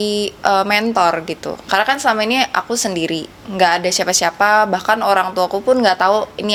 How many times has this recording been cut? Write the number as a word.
zero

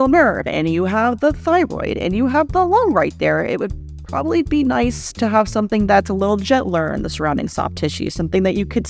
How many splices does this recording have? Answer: zero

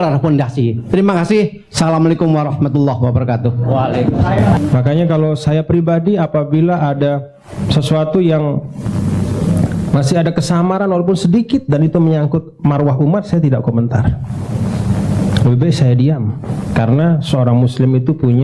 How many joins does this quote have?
one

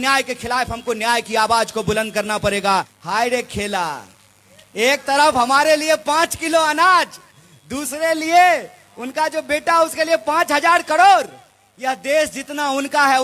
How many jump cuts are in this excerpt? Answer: one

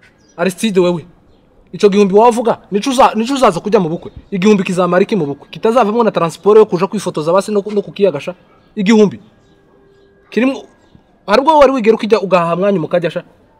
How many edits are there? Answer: zero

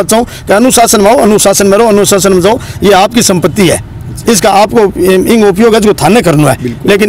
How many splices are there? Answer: zero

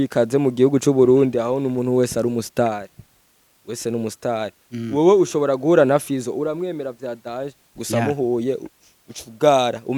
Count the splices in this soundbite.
zero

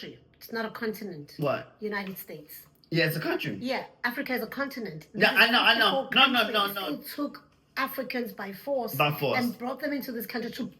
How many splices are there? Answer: one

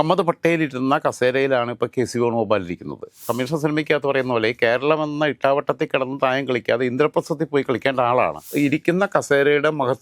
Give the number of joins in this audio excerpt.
two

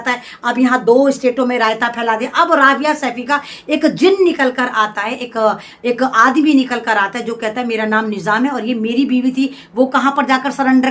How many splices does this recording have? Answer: zero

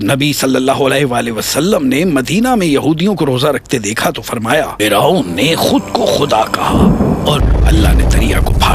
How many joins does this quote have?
two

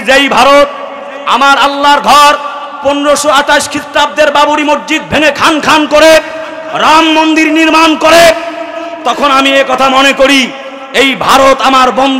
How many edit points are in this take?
zero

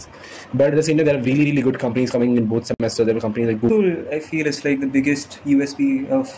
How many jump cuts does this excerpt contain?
one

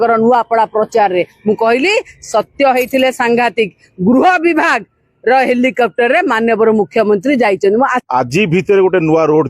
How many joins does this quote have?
one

